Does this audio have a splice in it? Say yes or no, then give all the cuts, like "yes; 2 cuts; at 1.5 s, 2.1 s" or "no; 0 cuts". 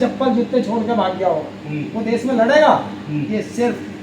no; 0 cuts